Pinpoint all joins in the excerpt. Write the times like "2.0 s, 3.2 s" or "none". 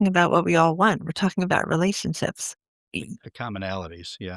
2.9 s